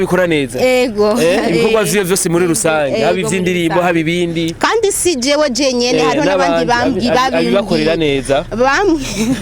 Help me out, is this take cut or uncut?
uncut